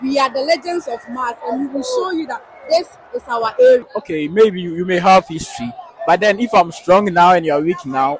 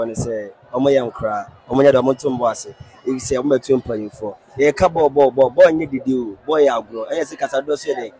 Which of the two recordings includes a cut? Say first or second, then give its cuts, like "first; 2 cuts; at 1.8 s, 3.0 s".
first; 1 cut; at 4.0 s